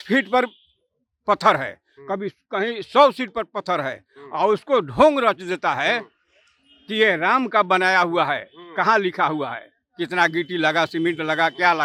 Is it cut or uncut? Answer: uncut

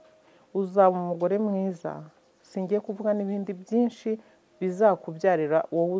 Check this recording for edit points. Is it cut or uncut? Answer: uncut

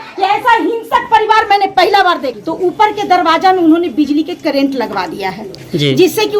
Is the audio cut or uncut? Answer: cut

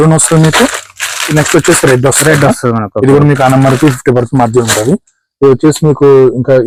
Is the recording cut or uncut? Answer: uncut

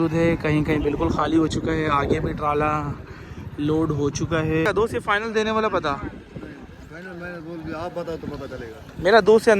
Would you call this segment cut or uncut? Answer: cut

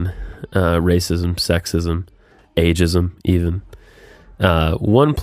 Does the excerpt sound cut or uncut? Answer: uncut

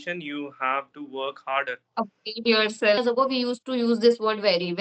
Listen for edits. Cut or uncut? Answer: cut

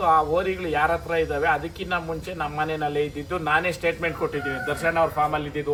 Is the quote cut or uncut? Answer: uncut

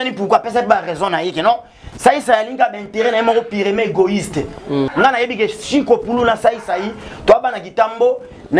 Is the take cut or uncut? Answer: cut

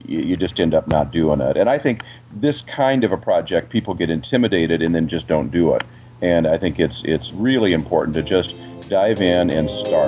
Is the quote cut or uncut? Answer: uncut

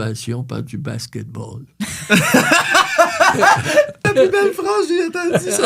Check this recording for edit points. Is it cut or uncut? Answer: cut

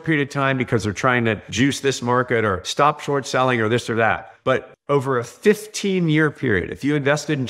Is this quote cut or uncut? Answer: cut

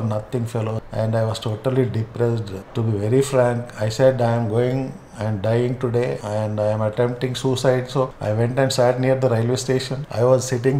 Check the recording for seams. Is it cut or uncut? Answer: uncut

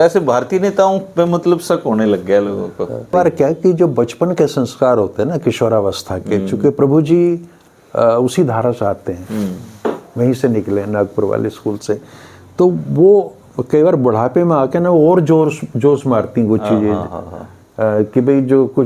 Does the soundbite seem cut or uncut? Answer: cut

